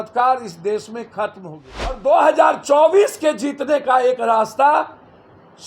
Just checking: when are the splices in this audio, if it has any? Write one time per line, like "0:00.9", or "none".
0:02.0

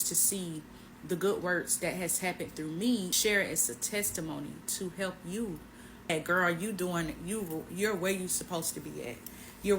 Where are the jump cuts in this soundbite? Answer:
0:03.1
0:06.1

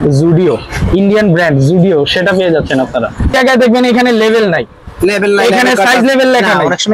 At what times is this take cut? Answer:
0:03.3

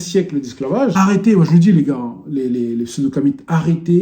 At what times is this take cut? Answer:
0:00.9

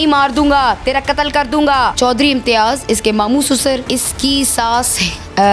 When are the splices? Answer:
0:01.9

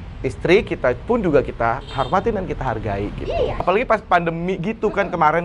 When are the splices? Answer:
0:03.6

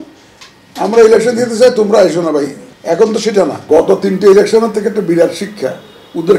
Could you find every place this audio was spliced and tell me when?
0:02.7
0:03.6

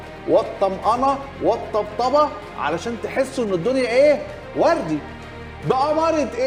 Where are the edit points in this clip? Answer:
none

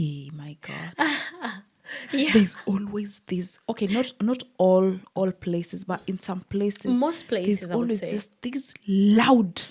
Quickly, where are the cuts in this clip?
none

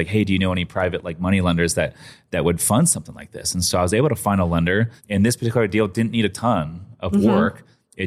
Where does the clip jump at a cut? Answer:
0:05.0

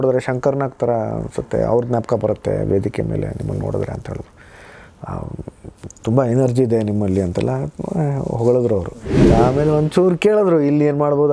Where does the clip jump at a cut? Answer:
0:09.1

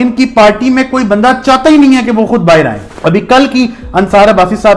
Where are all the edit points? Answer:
0:02.9

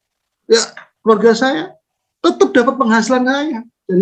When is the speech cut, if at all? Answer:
none

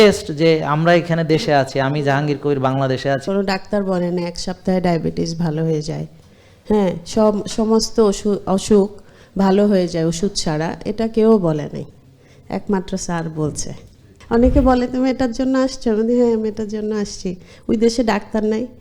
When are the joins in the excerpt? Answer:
0:03.2
0:14.1

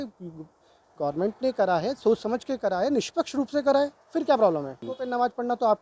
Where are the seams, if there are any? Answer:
0:04.9

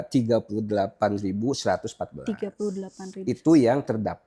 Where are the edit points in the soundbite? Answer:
none

